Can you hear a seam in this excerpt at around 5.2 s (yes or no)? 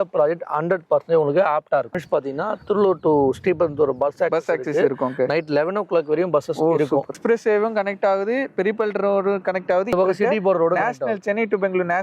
no